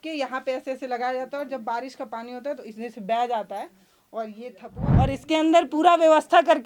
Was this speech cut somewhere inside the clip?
yes; 1 cut; at 4.8 s

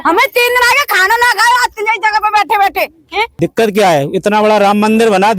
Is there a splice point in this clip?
yes; 1 cut; at 3.3 s

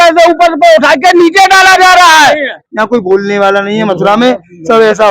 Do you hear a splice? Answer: yes; 1 cut; at 2.6 s

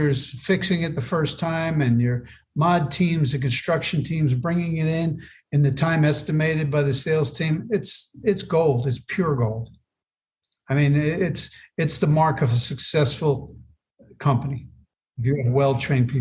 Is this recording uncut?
no; 1 cut; at 15.1 s

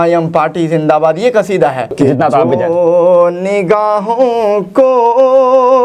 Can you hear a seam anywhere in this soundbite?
yes; 1 cut; at 1.8 s

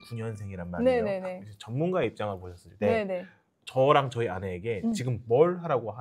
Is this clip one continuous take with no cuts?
yes; 0 cuts

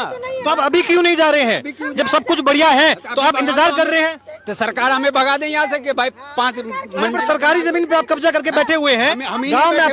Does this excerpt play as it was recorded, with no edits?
yes; 0 cuts

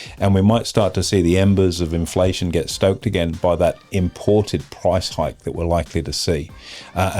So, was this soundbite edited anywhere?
no; 0 cuts

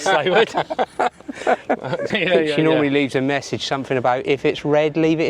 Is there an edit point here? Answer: yes; 1 cut; at 2.1 s

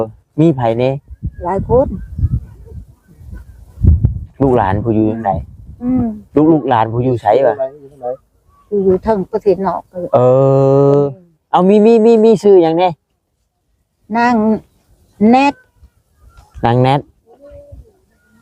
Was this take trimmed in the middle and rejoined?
no; 0 cuts

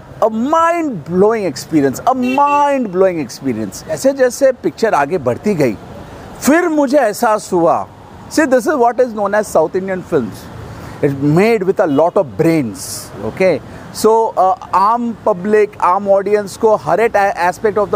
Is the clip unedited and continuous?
no; 1 cut; at 4.0 s

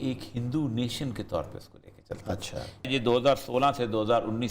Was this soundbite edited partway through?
yes; 1 cut; at 2.9 s

